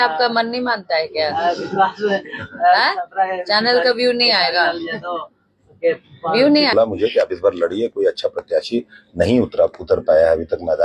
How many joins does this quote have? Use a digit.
1